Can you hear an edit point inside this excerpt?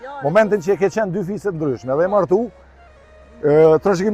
no; 0 cuts

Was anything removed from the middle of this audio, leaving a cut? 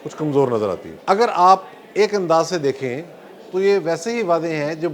yes; 1 cut; at 0.9 s

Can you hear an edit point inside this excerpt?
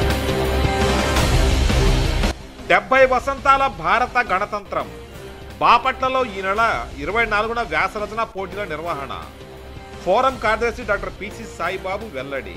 yes; 1 cut; at 2.3 s

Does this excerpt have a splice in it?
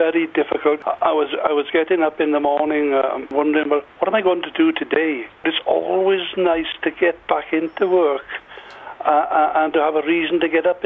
yes; 3 cuts; at 0.8 s, 3.4 s, 5.5 s

